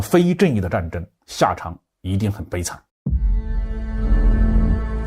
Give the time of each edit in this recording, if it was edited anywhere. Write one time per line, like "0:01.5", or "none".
0:02.8